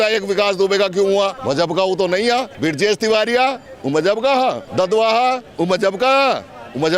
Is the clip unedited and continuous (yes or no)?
no